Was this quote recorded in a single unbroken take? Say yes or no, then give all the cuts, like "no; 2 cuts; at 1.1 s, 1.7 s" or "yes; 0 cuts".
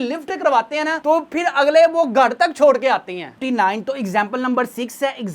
no; 1 cut; at 3.3 s